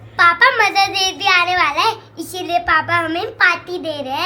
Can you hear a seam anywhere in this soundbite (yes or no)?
no